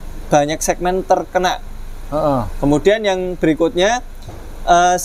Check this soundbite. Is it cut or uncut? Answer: uncut